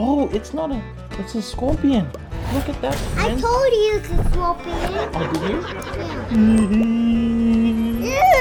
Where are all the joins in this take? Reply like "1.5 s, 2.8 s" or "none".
none